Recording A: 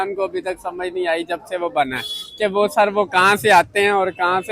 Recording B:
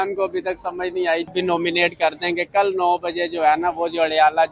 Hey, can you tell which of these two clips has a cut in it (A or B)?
B